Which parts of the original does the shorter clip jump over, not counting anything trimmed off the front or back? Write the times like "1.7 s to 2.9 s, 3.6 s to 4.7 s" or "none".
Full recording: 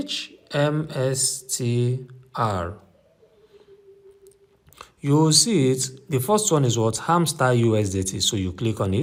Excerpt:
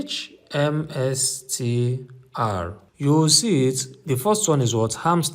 2.8 s to 4.9 s